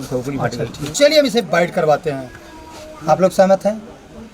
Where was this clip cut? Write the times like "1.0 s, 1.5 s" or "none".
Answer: 0.9 s